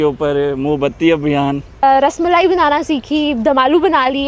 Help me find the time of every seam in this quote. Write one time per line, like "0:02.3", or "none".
0:01.8